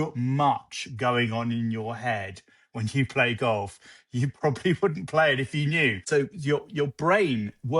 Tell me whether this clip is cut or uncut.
cut